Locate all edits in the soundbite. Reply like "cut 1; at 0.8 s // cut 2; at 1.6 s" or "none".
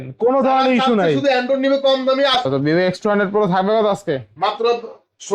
cut 1; at 2.3 s